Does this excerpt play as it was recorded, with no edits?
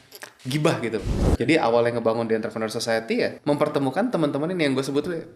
no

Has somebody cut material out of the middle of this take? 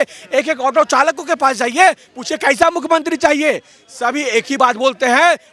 no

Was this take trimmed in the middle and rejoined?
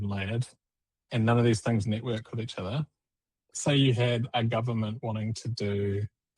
yes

